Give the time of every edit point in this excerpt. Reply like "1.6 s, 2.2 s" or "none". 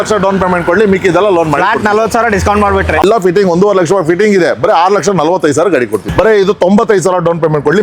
3.0 s, 6.1 s